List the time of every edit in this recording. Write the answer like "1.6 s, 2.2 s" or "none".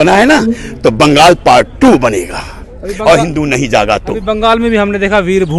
none